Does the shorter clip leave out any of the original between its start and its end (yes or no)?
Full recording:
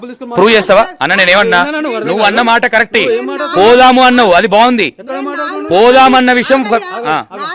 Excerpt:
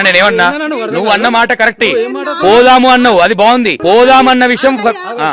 yes